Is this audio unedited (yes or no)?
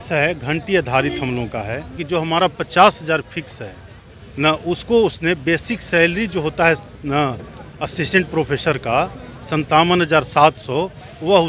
no